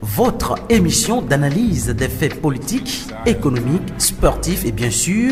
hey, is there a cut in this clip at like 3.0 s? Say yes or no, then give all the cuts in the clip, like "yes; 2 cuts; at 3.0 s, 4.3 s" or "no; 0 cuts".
no; 0 cuts